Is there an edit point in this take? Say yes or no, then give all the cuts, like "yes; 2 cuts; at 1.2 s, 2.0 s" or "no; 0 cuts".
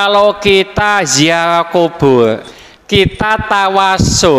yes; 1 cut; at 2.5 s